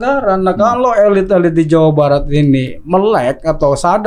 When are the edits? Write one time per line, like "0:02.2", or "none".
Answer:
none